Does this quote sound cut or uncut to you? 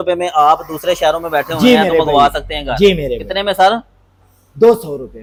uncut